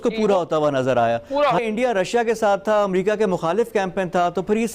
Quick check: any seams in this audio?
yes; 1 cut; at 1.6 s

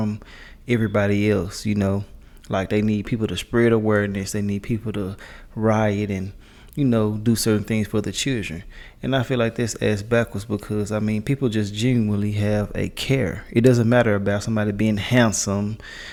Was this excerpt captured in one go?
yes; 0 cuts

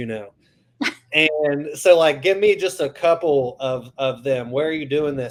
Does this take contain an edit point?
no; 0 cuts

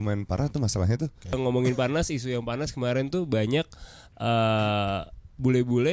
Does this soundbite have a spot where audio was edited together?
yes; 1 cut; at 1.3 s

